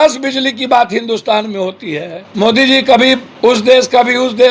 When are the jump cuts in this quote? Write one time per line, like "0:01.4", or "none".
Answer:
0:02.2
0:03.3